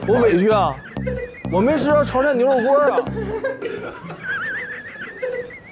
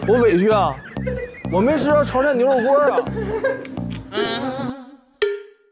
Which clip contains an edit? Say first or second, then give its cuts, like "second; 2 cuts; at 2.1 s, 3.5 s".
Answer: first; 1 cut; at 3.6 s